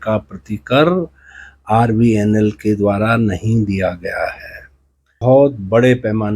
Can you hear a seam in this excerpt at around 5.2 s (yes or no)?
yes